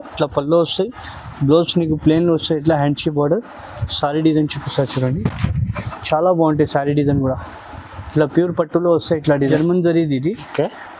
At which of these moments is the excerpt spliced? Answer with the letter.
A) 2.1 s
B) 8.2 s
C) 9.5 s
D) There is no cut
C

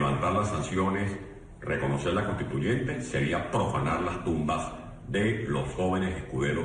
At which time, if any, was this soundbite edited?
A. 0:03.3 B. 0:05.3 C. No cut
C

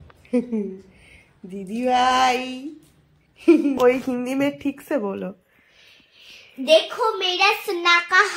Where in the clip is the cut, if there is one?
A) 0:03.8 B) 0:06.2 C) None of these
A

